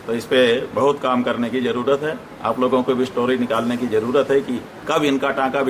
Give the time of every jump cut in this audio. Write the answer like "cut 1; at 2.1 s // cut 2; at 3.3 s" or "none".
none